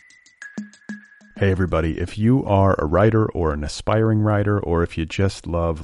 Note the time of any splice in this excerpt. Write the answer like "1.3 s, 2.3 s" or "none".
0.9 s